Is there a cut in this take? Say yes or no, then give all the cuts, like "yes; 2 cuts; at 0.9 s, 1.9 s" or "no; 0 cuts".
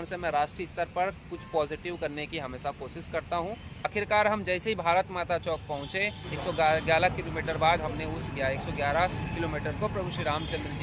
yes; 1 cut; at 3.9 s